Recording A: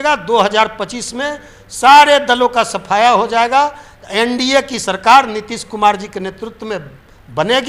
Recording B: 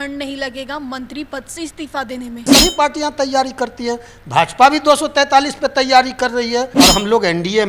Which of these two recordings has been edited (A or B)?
B